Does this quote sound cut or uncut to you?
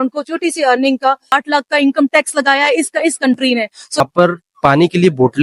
cut